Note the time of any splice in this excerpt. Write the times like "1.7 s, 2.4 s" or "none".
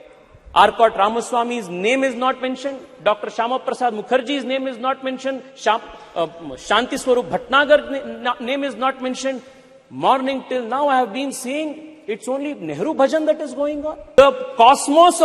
14.2 s